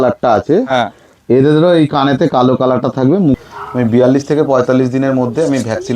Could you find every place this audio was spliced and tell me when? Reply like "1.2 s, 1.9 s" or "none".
3.4 s